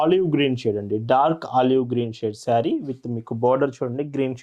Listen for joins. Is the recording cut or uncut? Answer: uncut